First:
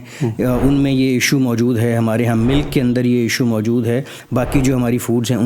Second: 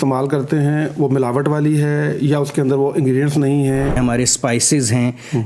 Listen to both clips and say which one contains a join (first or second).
second